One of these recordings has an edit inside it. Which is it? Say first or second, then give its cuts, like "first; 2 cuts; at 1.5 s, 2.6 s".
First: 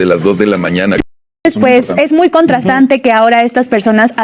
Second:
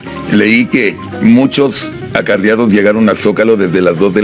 first; 1 cut; at 1.4 s